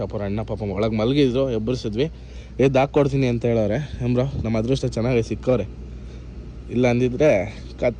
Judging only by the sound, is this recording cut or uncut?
uncut